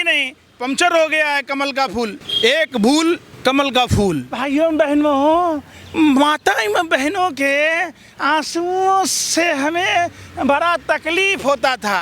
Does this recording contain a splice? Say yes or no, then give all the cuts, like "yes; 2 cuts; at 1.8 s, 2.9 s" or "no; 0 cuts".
yes; 3 cuts; at 2.2 s, 3.3 s, 4.3 s